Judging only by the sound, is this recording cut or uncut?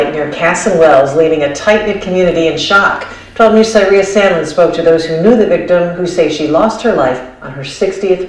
uncut